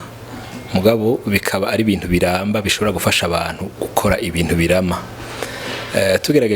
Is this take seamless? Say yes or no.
yes